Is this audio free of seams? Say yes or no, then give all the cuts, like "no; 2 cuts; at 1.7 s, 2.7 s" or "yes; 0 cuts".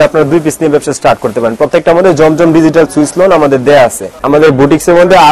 no; 1 cut; at 4.1 s